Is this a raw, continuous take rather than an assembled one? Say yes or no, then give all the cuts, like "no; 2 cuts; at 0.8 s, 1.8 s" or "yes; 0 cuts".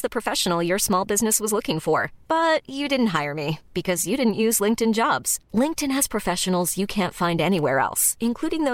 yes; 0 cuts